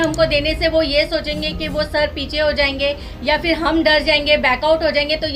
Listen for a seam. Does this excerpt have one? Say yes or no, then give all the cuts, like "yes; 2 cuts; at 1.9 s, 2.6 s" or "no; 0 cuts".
no; 0 cuts